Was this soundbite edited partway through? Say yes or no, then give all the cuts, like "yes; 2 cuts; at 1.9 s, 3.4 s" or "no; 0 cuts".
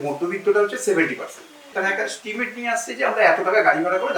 yes; 1 cut; at 1.7 s